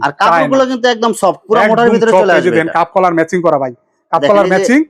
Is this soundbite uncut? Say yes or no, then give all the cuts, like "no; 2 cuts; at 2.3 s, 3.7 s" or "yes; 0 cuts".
yes; 0 cuts